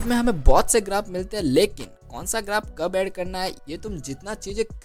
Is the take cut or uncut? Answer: uncut